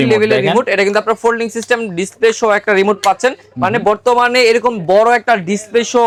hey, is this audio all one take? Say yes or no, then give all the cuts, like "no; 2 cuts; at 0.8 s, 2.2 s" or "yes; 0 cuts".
yes; 0 cuts